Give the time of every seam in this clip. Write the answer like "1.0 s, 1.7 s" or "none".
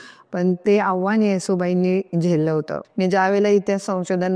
2.8 s